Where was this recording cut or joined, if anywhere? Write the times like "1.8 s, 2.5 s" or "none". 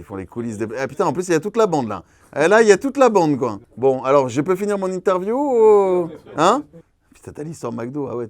6.7 s